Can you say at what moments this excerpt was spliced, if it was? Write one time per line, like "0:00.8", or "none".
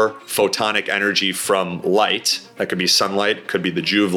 none